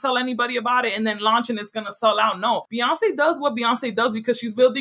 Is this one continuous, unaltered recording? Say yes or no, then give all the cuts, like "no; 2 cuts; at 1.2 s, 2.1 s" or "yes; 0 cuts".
no; 1 cut; at 2.7 s